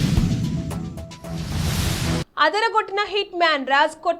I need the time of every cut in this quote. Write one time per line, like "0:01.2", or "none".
0:01.7